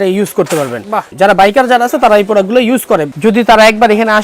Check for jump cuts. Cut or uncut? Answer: cut